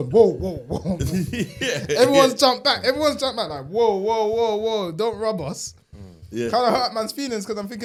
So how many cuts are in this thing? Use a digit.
0